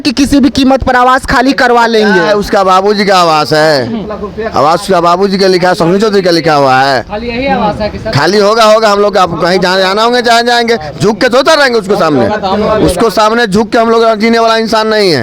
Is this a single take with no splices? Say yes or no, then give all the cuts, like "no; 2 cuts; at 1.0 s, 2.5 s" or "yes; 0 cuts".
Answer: yes; 0 cuts